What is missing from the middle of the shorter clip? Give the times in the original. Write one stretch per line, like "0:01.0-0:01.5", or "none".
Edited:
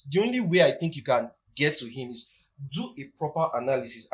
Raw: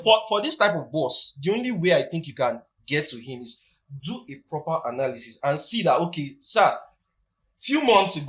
none

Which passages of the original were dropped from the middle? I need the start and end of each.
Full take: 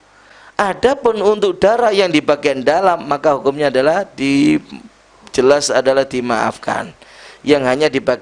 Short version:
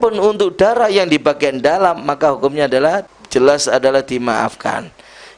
0:04.1-0:05.1

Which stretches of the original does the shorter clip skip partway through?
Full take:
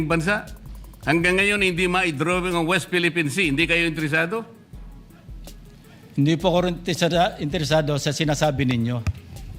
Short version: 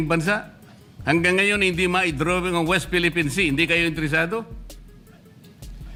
none

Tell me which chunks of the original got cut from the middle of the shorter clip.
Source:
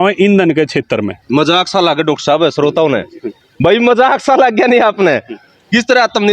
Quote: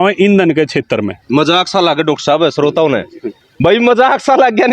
none

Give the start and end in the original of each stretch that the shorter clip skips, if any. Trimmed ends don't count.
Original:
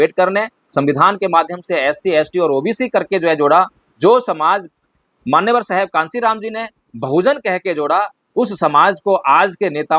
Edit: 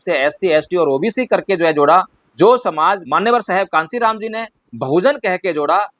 0:04.7-0:05.3

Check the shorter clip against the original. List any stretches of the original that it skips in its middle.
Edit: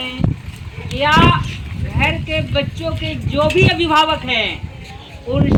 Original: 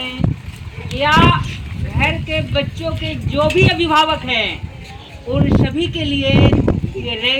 none

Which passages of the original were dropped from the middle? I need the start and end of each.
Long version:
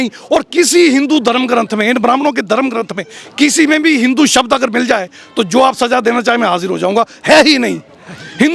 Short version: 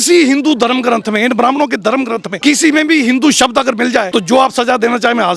0:02.9-0:03.2
0:05.0-0:05.3

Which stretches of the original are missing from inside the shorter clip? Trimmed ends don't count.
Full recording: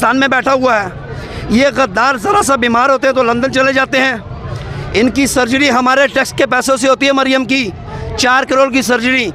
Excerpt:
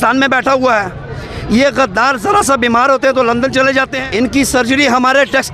0:04.0-0:04.8

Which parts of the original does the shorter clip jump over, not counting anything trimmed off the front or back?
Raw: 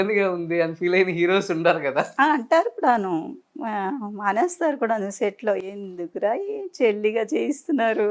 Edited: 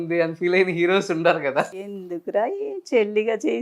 0:02.1-0:05.6

